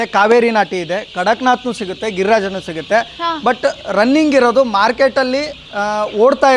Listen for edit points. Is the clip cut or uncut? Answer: uncut